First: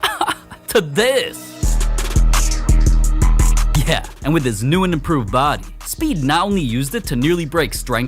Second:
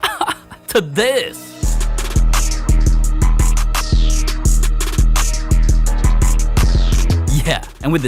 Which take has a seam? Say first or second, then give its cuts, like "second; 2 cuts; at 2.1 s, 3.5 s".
first; 1 cut; at 3.7 s